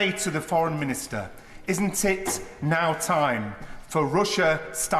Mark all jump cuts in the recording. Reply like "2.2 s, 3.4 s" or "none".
none